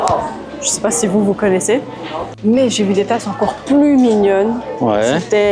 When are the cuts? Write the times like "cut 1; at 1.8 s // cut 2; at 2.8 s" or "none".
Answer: cut 1; at 2.4 s